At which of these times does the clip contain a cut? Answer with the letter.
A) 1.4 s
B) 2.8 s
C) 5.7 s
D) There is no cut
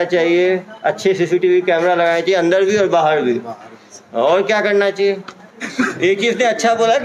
C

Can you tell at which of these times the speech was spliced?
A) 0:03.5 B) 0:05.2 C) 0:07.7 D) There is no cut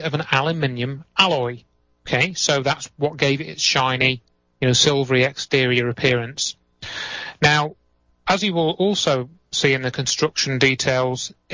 D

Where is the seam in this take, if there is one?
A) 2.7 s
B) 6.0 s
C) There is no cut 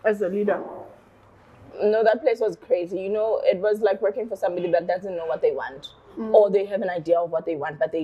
C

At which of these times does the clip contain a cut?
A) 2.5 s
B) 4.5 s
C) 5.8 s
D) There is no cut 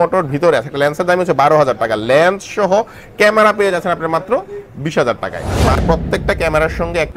C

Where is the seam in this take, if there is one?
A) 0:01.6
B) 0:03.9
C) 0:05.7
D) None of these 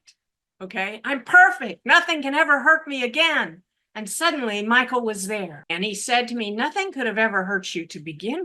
C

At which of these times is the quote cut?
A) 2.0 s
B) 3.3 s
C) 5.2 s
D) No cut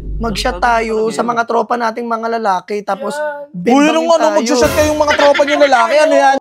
D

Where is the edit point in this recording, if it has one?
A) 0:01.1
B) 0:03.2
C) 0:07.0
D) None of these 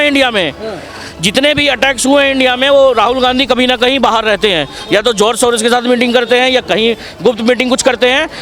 D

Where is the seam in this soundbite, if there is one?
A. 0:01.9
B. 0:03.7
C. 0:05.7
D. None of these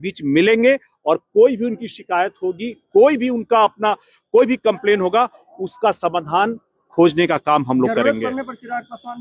D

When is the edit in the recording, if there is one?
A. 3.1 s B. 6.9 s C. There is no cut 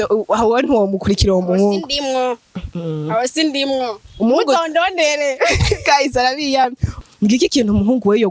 B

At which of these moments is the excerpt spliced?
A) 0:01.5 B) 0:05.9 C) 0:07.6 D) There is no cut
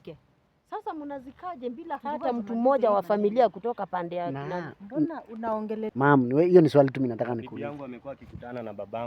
B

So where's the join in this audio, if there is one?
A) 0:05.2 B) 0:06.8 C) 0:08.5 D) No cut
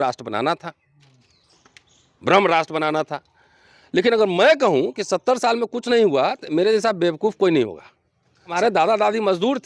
C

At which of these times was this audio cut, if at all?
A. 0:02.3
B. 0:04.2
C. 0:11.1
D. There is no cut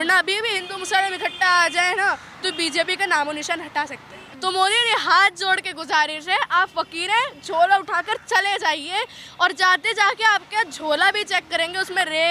B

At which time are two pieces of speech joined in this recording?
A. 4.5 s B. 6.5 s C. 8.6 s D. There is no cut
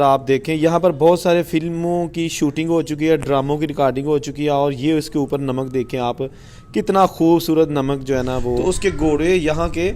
C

